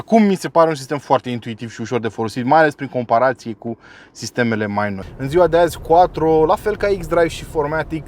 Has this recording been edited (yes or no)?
yes